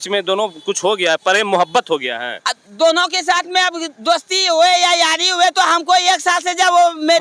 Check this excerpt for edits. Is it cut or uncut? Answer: uncut